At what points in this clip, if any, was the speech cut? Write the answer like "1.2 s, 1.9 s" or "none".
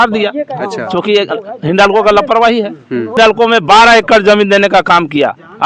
3.2 s